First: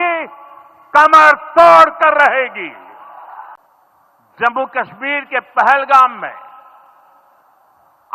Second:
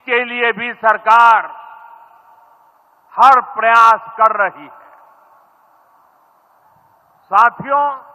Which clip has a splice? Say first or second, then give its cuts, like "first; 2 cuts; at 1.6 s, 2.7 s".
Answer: first; 1 cut; at 3.5 s